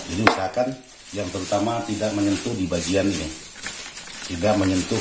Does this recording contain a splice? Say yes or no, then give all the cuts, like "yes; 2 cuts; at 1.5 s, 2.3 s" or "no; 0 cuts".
no; 0 cuts